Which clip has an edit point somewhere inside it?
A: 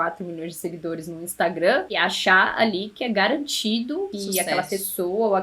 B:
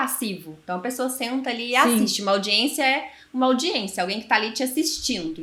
A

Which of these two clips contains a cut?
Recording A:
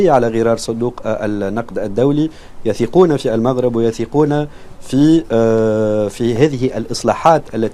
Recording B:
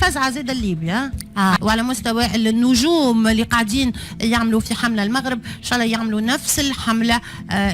B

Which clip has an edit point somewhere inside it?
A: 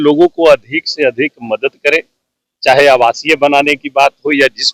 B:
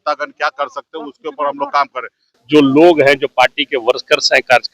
B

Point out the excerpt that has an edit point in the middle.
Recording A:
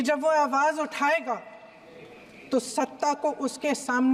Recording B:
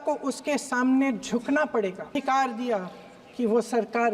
B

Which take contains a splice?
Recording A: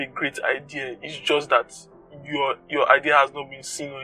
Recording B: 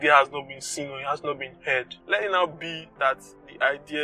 B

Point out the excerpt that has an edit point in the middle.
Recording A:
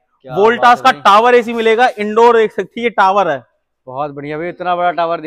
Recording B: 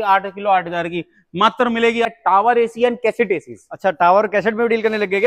B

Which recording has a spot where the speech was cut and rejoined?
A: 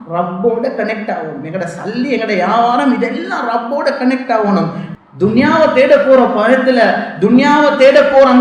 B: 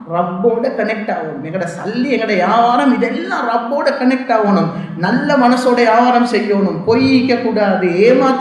A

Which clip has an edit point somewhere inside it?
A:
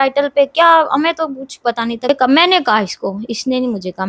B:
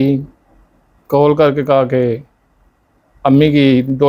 A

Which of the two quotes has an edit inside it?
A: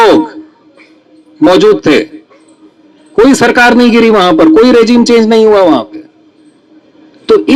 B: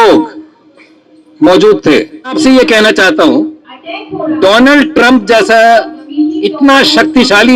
B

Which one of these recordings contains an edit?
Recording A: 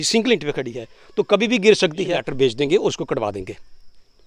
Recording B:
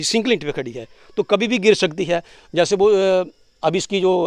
A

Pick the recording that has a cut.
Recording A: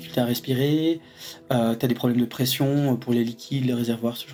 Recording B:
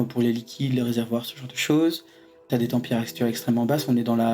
B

